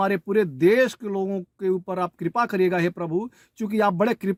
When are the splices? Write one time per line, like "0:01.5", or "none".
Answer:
none